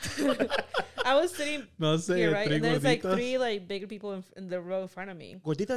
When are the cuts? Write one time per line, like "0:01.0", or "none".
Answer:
none